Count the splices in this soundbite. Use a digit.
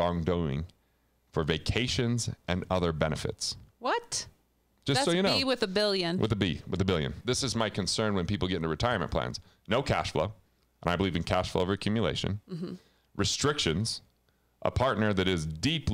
1